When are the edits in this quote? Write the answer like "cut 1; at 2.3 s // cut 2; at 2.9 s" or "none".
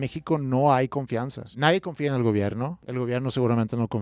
cut 1; at 1.4 s // cut 2; at 2.8 s